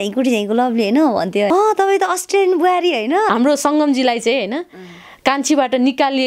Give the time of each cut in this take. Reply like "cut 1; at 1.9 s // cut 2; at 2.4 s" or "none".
cut 1; at 1.5 s // cut 2; at 3.3 s

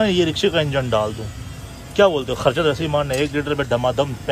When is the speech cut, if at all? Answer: none

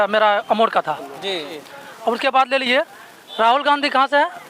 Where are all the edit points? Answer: cut 1; at 1.5 s

